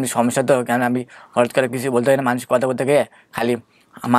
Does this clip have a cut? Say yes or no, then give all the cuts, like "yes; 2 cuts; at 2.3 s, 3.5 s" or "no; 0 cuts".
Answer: no; 0 cuts